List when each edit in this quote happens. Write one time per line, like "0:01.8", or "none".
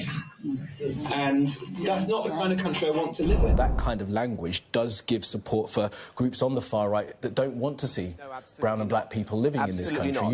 0:03.6